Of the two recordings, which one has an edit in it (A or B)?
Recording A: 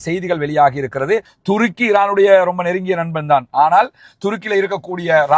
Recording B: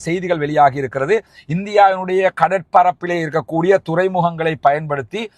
A